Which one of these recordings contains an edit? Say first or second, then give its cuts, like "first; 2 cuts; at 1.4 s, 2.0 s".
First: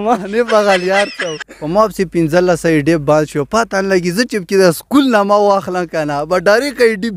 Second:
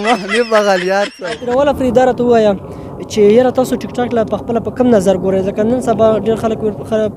first; 1 cut; at 1.4 s